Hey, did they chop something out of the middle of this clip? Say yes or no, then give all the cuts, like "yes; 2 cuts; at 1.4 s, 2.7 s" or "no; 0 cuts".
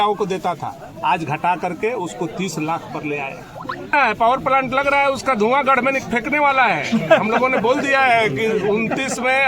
yes; 1 cut; at 3.9 s